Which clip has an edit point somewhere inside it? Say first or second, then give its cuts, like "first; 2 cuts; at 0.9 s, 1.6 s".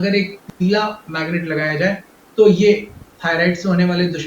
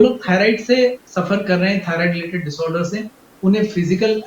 second; 1 cut; at 1.0 s